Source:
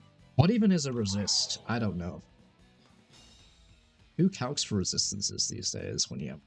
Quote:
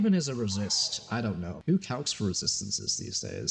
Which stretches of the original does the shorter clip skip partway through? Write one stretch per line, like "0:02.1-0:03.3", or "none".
0:02.1-0:04.1